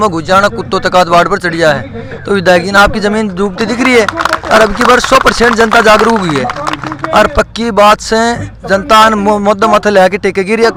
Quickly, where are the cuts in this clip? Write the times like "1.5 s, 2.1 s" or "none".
none